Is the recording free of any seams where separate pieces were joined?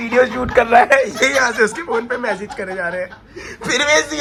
yes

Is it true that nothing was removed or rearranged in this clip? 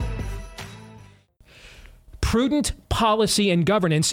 no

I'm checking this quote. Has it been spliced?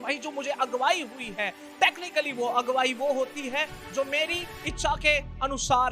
no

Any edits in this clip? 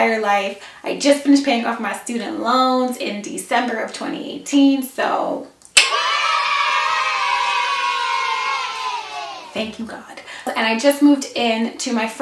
yes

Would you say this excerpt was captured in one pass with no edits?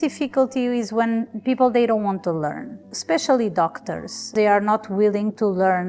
yes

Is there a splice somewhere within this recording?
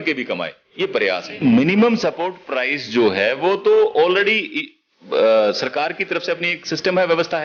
yes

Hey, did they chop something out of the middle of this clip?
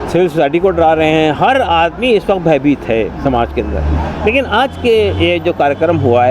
no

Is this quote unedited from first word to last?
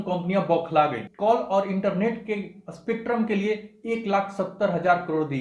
no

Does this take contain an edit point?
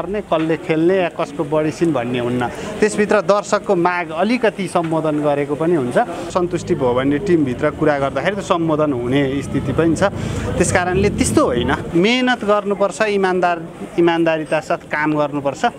yes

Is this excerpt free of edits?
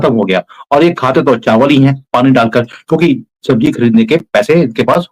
yes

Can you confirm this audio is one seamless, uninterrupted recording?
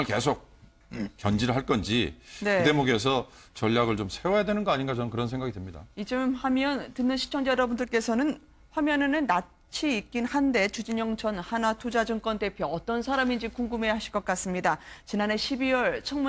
yes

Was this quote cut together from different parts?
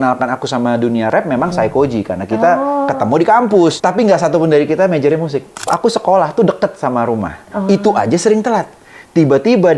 yes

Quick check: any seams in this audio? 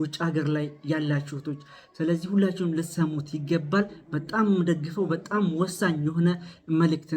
no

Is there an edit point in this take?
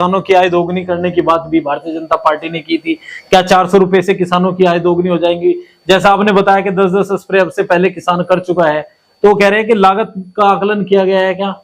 no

